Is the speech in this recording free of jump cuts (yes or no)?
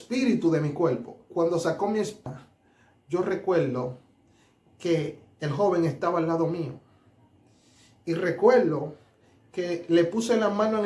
no